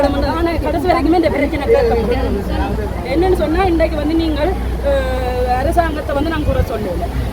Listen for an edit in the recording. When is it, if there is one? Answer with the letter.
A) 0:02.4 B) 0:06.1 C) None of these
C